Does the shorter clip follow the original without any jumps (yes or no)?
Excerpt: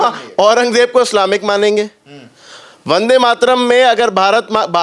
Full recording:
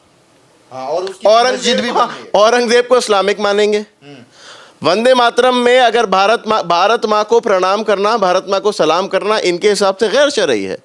yes